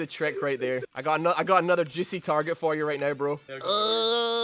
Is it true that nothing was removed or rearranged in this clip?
no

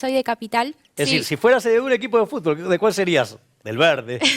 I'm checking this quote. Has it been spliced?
yes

